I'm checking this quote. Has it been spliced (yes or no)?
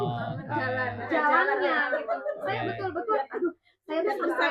no